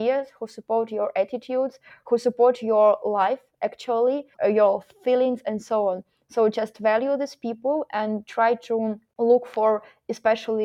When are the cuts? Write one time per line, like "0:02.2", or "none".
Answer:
0:04.3
0:09.0